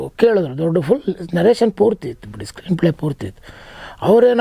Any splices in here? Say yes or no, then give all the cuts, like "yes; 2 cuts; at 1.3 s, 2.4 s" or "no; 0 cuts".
no; 0 cuts